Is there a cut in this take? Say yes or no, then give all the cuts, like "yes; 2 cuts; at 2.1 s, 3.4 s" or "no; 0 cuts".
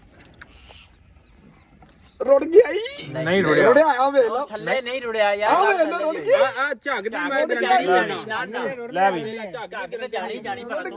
no; 0 cuts